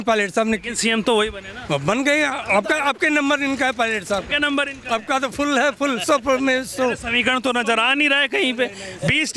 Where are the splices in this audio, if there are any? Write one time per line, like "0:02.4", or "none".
none